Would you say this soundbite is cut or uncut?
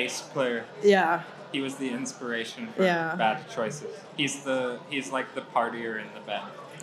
uncut